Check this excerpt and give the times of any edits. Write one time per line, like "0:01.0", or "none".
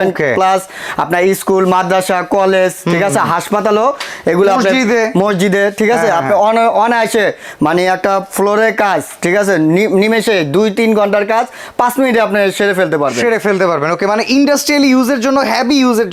none